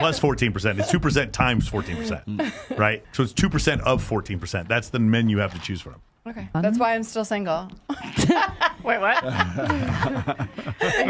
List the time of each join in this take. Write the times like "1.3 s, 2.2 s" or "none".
3.0 s, 6.5 s